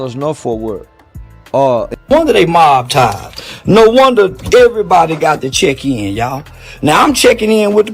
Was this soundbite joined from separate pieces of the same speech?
yes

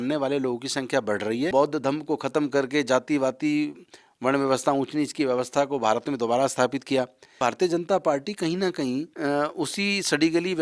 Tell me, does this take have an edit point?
yes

